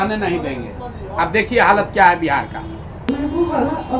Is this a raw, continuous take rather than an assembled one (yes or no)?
no